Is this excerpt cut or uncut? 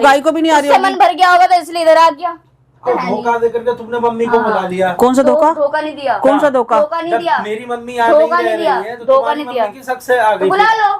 cut